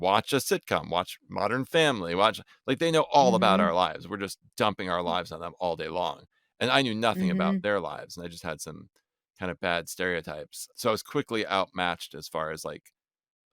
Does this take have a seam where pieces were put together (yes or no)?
yes